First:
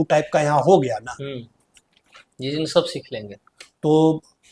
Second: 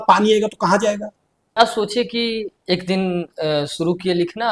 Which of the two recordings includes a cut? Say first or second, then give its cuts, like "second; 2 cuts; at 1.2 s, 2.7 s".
second; 1 cut; at 1.6 s